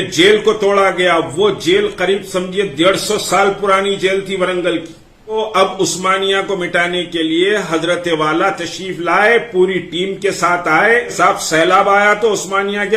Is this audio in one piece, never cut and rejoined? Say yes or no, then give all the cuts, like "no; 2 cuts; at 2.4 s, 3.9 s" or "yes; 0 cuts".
no; 2 cuts; at 5.3 s, 11.1 s